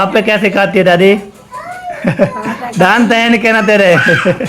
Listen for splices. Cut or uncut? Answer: cut